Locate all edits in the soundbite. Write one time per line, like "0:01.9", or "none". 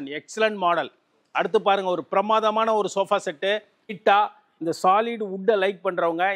0:04.0